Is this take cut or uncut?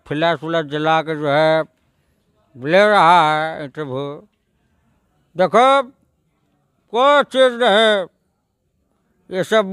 uncut